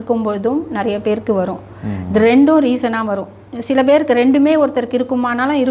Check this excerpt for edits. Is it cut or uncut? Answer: uncut